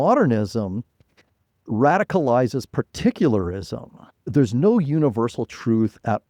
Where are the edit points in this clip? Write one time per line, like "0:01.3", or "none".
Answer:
0:04.2